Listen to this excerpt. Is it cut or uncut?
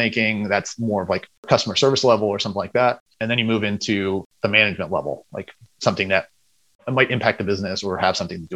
cut